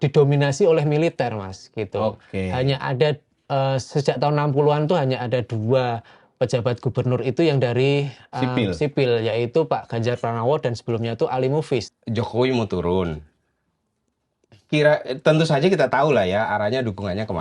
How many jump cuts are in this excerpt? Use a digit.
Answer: 1